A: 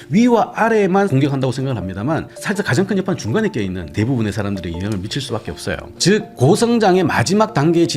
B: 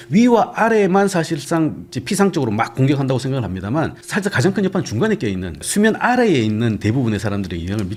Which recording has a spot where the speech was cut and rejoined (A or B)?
A